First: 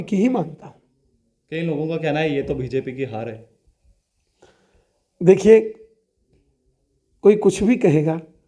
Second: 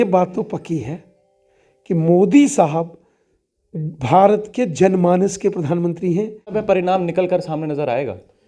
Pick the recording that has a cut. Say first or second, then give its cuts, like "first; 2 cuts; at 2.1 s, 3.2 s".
second; 1 cut; at 6.5 s